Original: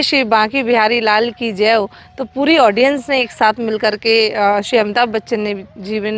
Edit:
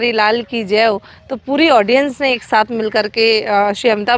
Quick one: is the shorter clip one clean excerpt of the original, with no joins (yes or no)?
yes